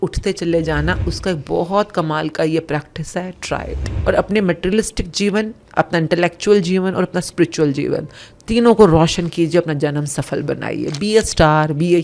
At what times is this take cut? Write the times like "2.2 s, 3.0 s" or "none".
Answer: 3.9 s